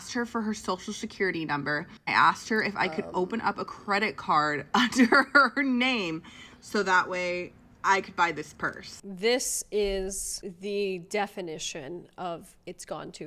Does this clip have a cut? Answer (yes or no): no